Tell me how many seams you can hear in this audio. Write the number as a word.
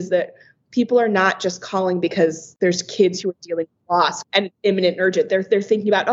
two